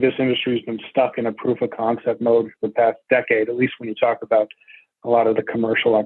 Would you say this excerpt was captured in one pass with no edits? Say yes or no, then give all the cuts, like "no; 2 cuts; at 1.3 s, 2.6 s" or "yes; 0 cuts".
yes; 0 cuts